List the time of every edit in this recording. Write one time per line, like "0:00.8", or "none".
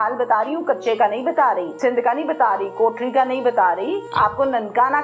0:01.7
0:04.0